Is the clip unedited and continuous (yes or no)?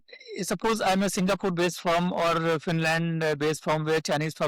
yes